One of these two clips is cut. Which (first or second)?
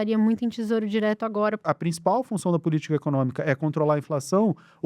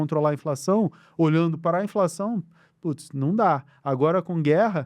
first